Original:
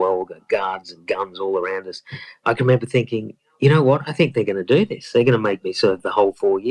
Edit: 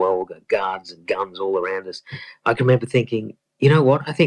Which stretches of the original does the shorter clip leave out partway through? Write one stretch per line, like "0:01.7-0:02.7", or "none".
none